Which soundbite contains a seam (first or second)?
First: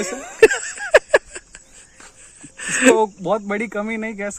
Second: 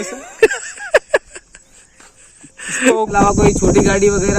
second